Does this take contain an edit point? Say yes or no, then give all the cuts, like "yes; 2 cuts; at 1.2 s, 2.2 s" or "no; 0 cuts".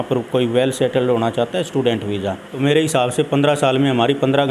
yes; 1 cut; at 2.5 s